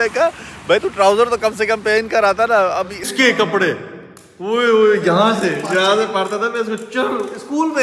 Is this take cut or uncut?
cut